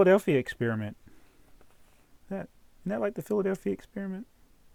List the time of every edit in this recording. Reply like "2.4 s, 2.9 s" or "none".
none